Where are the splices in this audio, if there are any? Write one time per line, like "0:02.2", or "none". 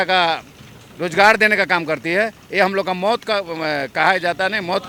none